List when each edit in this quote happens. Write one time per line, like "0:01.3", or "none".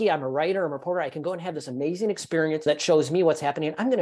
0:02.6